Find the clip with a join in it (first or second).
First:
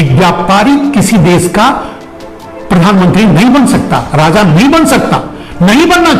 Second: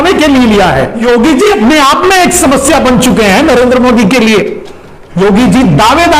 second